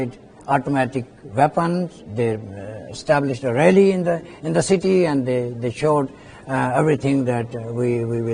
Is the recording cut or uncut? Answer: uncut